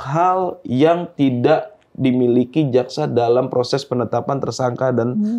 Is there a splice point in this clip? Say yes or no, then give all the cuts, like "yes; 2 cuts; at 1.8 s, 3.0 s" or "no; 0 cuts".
no; 0 cuts